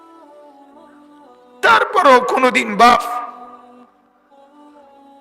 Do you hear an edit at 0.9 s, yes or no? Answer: no